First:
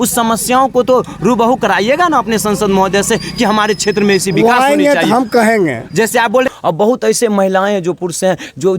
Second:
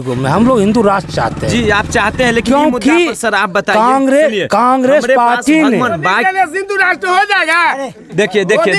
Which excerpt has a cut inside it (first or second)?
first